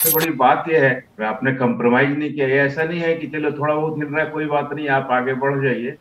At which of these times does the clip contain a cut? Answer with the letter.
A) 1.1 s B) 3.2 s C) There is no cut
A